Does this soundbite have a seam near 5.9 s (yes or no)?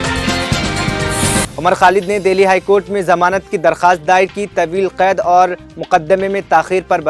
no